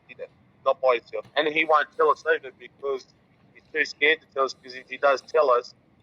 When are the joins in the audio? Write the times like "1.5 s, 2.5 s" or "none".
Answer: 1.2 s